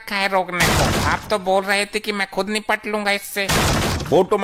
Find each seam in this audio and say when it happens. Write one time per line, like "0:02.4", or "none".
none